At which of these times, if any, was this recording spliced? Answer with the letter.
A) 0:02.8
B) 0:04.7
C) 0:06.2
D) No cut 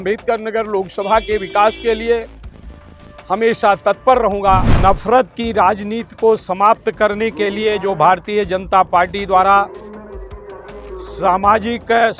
B